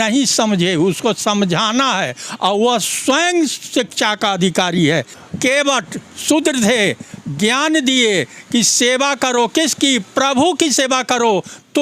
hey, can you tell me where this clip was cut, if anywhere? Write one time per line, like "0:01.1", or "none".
0:05.2